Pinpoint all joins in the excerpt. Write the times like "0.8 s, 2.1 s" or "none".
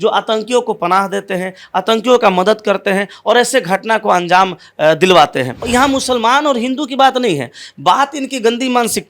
5.6 s